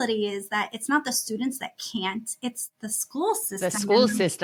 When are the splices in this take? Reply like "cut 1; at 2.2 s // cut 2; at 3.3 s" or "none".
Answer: none